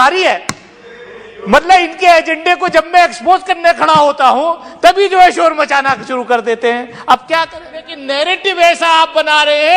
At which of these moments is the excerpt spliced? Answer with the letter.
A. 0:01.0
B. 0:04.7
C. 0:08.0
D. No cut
C